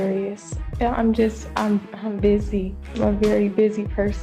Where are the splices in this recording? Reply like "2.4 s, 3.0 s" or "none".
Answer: 2.8 s

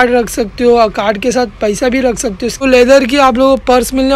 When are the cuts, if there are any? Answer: 2.6 s

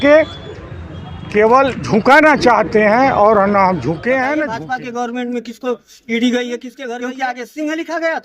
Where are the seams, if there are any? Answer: 4.6 s, 6.8 s

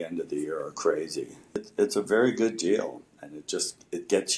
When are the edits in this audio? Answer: 1.6 s

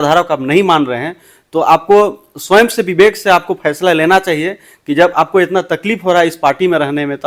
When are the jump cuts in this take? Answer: none

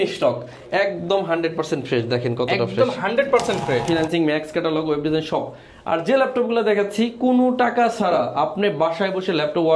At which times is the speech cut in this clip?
3.8 s

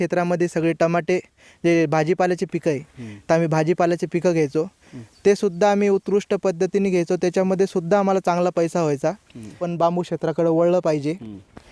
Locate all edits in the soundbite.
9.7 s

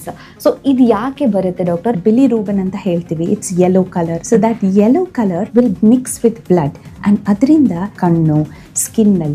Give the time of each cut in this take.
2.0 s, 4.2 s, 5.4 s, 7.9 s

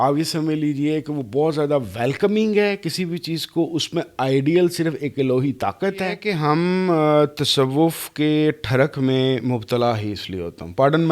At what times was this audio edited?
6.3 s

